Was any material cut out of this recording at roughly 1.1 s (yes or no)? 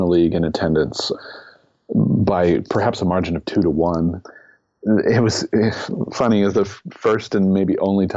yes